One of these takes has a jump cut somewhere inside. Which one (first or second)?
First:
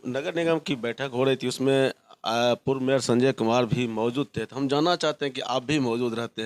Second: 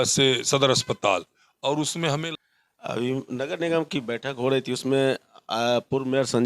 second